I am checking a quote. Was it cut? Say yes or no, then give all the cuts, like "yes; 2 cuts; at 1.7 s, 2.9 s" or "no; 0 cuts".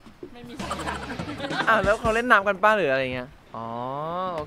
yes; 1 cut; at 3.4 s